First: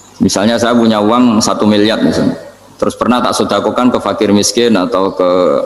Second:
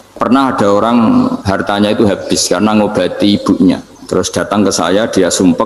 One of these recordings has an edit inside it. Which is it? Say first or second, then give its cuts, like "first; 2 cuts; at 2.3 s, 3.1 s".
second; 2 cuts; at 1.4 s, 3.9 s